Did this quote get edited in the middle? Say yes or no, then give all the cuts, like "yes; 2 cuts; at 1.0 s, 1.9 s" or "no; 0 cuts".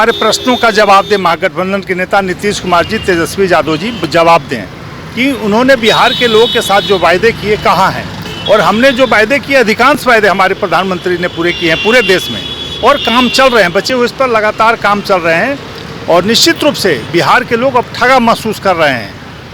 no; 0 cuts